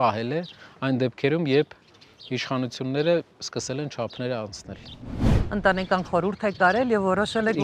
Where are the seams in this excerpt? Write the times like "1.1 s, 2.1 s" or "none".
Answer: 5.2 s